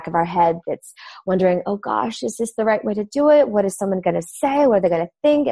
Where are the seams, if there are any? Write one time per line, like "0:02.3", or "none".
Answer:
none